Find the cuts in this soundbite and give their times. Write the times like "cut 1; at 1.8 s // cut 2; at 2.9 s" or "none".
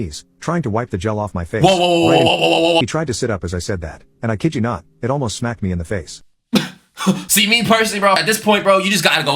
cut 1; at 2.8 s // cut 2; at 7.2 s // cut 3; at 8.2 s